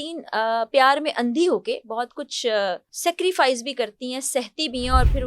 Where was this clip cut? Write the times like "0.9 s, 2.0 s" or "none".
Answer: 2.9 s